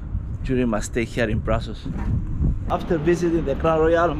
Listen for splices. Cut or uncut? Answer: cut